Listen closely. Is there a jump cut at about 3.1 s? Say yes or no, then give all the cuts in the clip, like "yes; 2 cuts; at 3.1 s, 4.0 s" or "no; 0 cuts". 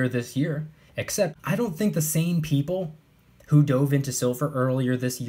no; 1 cut; at 1.4 s